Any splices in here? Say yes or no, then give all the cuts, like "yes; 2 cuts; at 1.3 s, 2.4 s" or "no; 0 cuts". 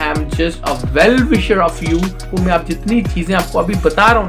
yes; 1 cut; at 2.3 s